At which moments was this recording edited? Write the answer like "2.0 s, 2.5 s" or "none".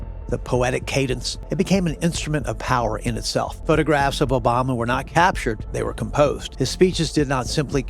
1.4 s, 3.6 s, 5.7 s, 6.5 s